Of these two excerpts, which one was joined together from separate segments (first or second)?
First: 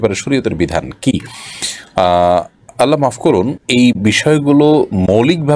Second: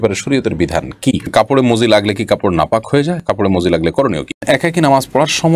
second